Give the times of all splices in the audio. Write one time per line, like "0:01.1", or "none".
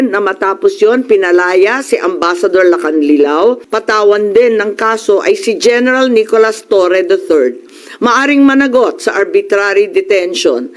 0:03.7